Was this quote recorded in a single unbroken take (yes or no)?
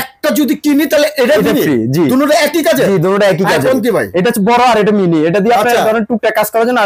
yes